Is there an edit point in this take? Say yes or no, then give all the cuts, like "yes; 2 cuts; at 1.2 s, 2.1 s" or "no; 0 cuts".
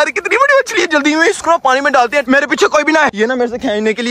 yes; 2 cuts; at 2.2 s, 3.1 s